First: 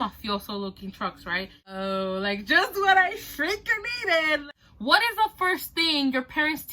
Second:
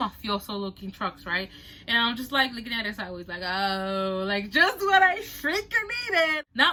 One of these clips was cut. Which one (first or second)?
first